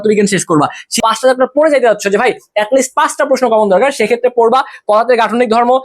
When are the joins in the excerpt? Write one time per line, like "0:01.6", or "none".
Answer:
0:01.0